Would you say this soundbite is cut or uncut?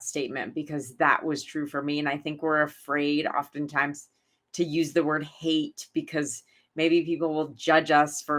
uncut